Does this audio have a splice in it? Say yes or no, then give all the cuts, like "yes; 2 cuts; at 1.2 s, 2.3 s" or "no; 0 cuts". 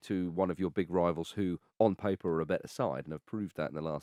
no; 0 cuts